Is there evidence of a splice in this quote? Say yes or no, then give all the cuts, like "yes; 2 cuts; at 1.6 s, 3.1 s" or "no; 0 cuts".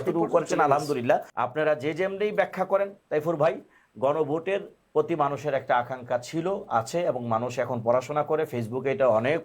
yes; 1 cut; at 1.4 s